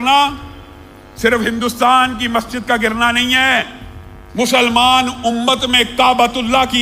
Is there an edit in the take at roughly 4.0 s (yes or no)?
no